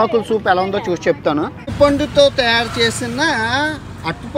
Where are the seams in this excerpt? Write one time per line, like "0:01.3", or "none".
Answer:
0:01.6